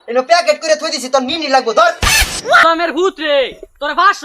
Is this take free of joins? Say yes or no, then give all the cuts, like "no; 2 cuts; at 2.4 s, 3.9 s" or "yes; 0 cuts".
no; 1 cut; at 2.6 s